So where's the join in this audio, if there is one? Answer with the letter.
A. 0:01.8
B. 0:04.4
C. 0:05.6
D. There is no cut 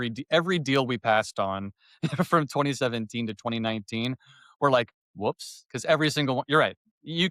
B